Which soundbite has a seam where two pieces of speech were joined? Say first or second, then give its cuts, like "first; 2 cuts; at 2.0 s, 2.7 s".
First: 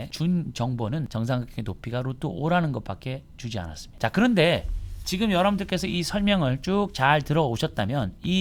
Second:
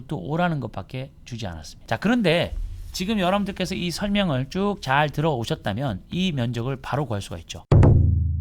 second; 1 cut; at 7.5 s